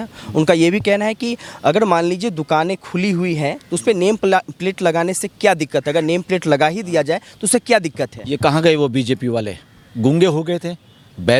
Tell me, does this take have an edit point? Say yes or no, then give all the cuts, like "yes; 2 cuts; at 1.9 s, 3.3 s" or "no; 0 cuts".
no; 0 cuts